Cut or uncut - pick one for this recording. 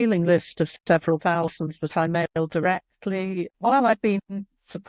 cut